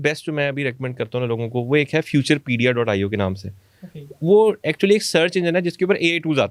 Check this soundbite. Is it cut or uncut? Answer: uncut